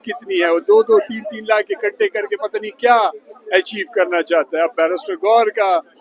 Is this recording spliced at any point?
no; 0 cuts

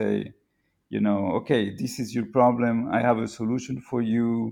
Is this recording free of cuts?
yes; 0 cuts

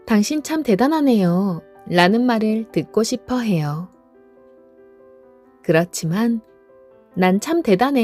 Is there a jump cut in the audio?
no; 0 cuts

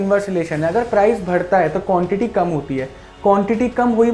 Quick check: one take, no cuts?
yes; 0 cuts

